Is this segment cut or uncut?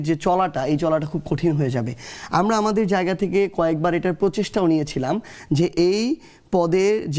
uncut